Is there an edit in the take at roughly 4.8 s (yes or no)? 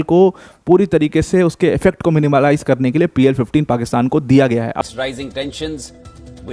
yes